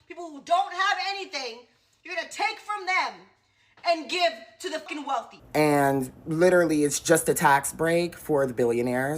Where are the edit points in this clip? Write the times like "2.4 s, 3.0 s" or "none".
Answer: 5.4 s